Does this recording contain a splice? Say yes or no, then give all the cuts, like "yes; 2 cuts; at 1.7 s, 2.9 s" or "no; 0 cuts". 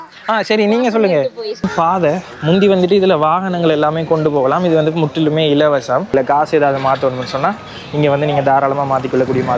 yes; 2 cuts; at 1.7 s, 6.1 s